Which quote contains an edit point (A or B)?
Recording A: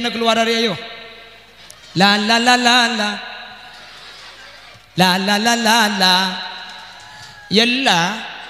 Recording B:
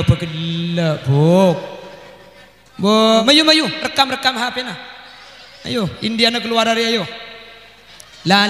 B